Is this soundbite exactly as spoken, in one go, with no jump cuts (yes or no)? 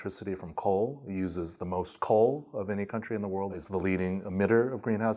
no